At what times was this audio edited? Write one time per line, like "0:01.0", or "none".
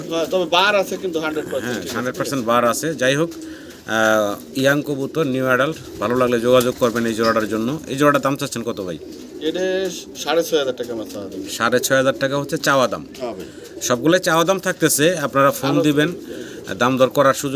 none